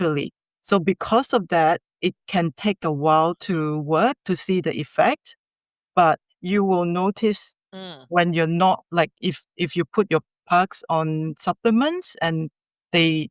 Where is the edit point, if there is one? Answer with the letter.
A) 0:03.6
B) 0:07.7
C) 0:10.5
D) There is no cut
D